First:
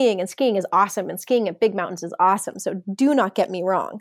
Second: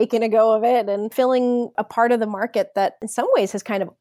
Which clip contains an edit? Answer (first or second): second